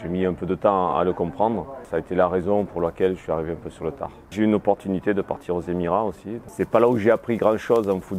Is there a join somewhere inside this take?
yes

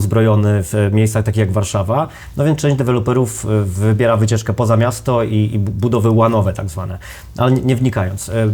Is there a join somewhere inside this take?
no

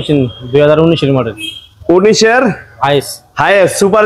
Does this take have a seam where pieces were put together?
no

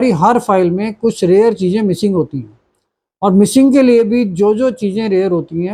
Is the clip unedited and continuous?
yes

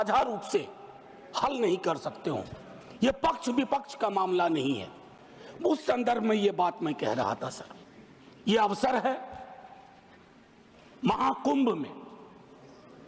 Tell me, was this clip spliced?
no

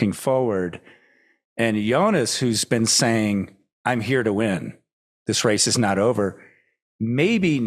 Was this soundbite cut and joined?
no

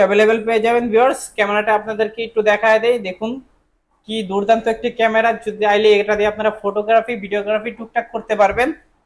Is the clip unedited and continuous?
yes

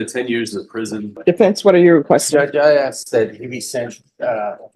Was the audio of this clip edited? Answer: yes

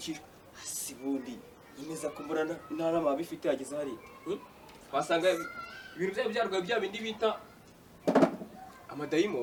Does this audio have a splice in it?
no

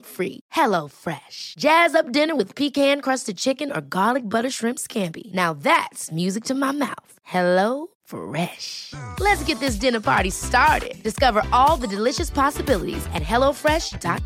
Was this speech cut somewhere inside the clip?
no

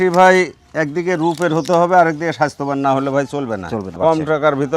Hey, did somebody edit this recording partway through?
yes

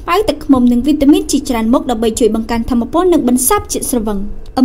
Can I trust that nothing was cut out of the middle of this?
yes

